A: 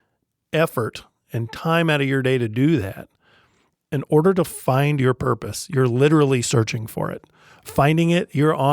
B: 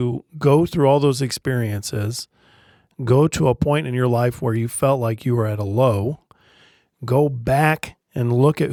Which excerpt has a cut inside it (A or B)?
A